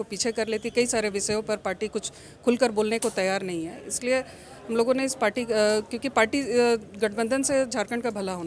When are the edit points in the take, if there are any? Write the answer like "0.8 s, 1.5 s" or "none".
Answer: none

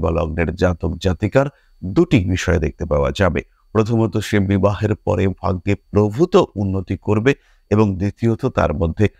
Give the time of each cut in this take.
none

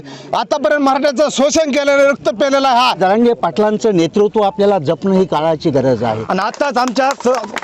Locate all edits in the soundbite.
3.0 s, 6.2 s

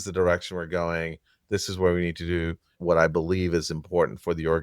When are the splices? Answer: 2.8 s

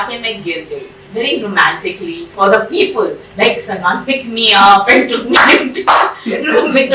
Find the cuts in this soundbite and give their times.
1.0 s, 2.3 s

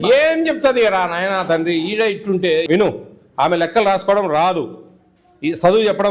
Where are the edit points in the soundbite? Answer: 2.7 s

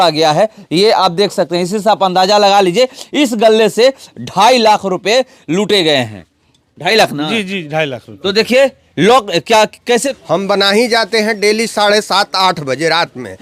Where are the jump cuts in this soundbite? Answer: 10.1 s

